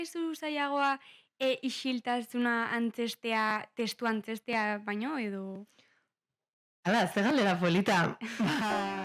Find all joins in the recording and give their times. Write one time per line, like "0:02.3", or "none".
none